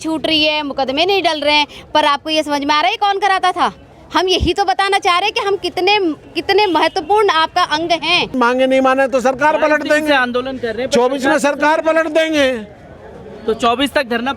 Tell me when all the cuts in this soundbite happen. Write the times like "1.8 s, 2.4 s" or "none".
8.3 s